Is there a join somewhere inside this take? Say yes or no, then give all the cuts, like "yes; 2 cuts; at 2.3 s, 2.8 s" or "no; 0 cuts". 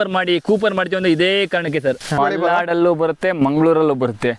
yes; 1 cut; at 2.1 s